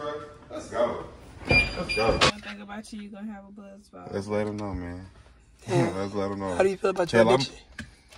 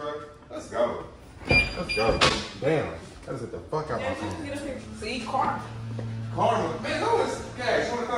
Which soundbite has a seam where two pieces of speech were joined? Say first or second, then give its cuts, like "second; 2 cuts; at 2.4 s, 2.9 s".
first; 1 cut; at 2.3 s